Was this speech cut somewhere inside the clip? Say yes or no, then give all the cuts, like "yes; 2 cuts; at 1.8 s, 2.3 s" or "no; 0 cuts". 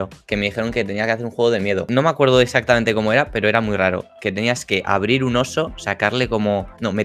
no; 0 cuts